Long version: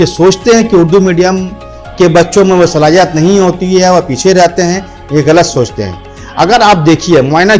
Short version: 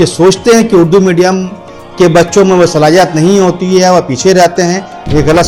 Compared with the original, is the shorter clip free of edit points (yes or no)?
yes